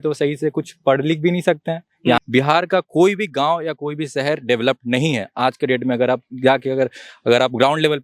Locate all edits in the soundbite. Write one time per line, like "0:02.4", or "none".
0:02.2